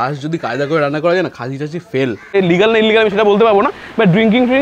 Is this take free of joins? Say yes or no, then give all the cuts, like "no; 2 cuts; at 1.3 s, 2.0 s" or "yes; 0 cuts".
no; 1 cut; at 2.2 s